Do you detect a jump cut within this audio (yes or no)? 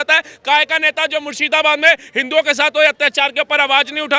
no